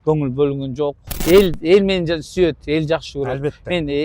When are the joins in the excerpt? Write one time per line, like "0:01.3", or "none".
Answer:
0:01.1